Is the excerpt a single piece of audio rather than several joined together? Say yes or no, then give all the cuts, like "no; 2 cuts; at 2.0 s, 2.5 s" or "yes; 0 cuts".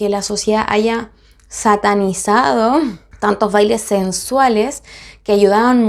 yes; 0 cuts